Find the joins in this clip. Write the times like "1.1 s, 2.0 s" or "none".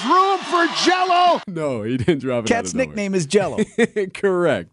1.4 s

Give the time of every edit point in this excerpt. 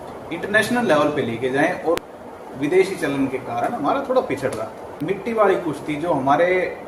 2.0 s, 5.0 s

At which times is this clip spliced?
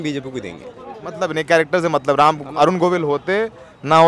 none

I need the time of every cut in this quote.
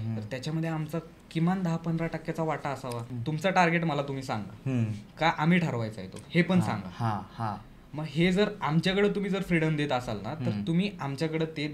3.1 s

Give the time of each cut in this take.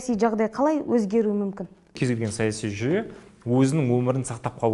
2.0 s

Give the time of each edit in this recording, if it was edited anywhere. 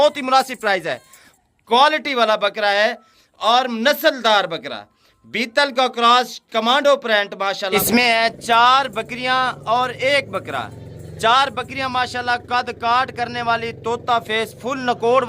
1.2 s, 7.7 s

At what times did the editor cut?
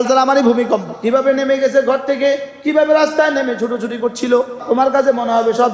0.9 s, 4.6 s

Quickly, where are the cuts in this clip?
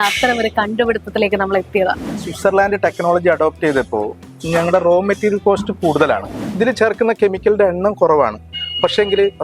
2.3 s, 6.4 s

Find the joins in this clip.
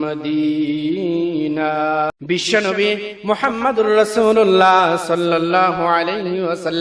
2.1 s

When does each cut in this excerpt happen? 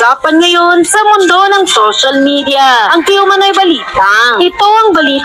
none

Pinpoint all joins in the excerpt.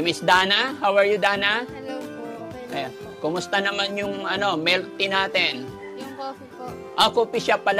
none

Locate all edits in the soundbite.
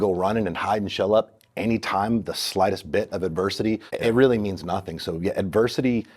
3.9 s

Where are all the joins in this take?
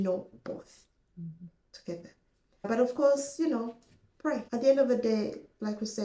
2.7 s, 4.5 s

